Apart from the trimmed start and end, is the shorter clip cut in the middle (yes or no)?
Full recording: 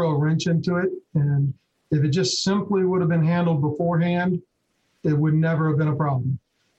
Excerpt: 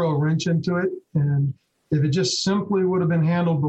no